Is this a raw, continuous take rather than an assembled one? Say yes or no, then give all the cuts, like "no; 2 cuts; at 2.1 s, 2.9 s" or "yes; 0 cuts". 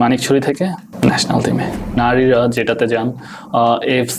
no; 2 cuts; at 0.9 s, 2.0 s